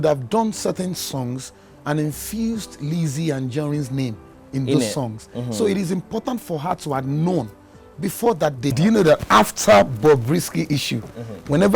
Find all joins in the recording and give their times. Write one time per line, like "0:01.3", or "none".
0:08.7